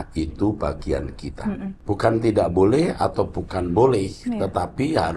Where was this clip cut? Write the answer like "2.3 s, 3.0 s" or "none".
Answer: 1.8 s